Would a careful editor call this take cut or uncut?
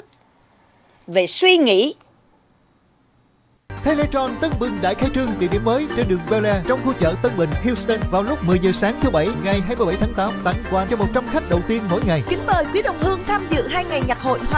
cut